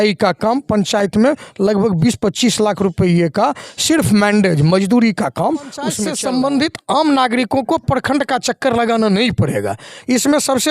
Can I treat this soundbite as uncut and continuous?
no; 1 cut; at 6.1 s

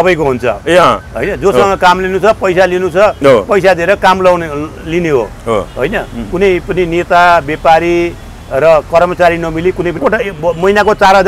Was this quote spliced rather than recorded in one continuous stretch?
yes; 1 cut; at 10.0 s

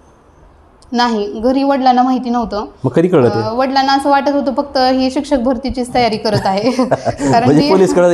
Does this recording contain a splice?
no; 0 cuts

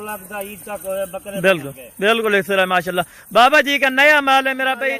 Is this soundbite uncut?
yes; 0 cuts

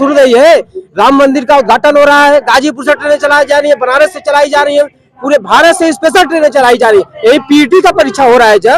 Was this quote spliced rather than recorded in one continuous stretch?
no; 0 cuts

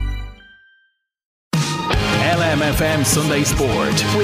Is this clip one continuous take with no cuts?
no; 1 cut; at 1.4 s

